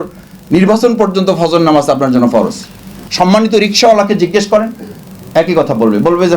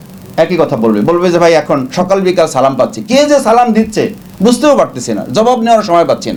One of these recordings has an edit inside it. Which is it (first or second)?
first